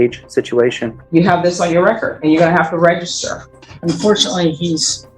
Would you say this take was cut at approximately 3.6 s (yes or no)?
yes